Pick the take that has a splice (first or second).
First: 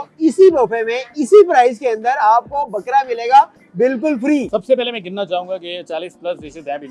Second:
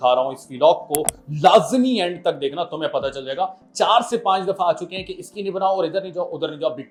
first